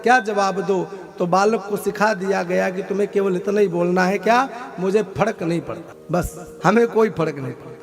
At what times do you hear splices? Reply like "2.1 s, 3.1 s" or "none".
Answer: 6.2 s